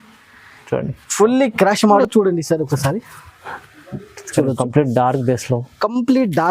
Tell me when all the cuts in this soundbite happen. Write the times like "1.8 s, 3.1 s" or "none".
2.0 s